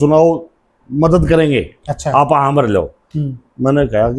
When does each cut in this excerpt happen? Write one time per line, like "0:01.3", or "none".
none